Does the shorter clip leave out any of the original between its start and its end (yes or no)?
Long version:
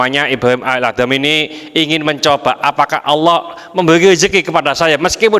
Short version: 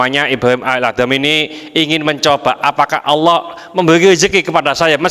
no